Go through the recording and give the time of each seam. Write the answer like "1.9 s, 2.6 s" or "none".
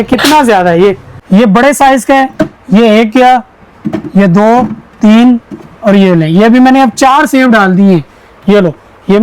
1.1 s